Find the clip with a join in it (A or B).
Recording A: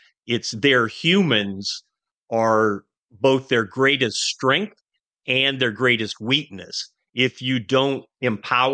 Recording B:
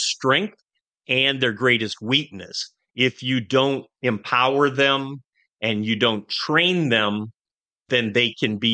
B